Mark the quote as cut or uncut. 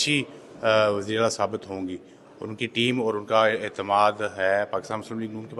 uncut